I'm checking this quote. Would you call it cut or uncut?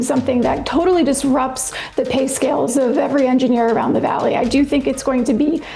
uncut